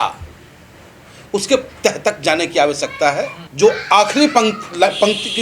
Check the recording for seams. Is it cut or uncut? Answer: cut